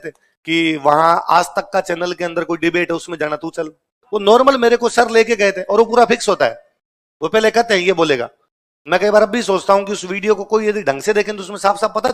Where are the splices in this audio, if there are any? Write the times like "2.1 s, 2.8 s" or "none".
none